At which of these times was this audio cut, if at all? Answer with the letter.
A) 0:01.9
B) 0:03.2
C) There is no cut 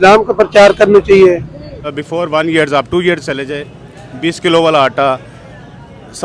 A